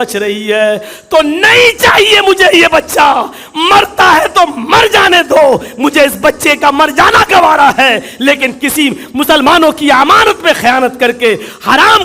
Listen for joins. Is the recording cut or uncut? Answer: uncut